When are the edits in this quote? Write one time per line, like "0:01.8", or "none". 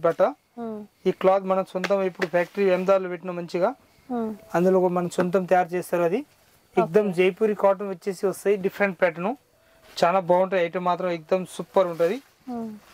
none